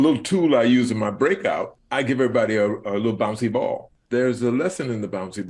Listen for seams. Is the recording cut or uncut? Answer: cut